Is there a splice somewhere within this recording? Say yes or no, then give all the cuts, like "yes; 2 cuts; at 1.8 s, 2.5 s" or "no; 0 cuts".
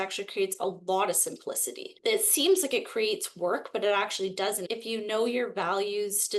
yes; 2 cuts; at 1.9 s, 4.6 s